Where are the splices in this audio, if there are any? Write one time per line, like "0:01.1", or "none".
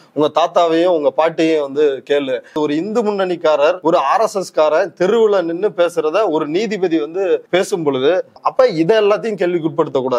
0:02.6
0:03.8
0:07.4
0:08.3